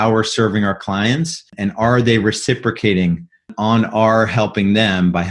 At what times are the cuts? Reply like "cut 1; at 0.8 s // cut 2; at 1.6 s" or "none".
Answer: cut 1; at 1.4 s